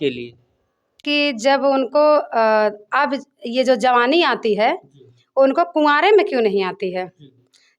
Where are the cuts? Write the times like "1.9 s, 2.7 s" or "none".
1.0 s